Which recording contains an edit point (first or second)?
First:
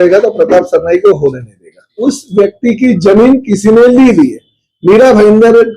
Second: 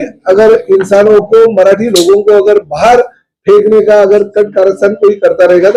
first